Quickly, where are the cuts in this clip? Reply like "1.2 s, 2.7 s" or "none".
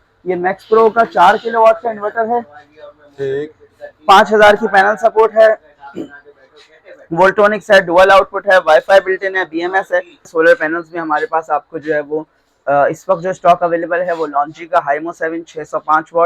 10.3 s